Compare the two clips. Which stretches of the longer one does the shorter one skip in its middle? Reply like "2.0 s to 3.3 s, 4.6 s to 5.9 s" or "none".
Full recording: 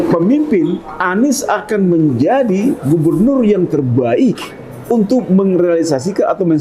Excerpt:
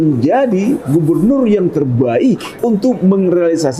4.5 s to 4.8 s